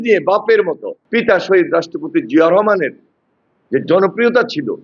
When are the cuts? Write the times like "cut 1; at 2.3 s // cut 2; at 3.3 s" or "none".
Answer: cut 1; at 0.9 s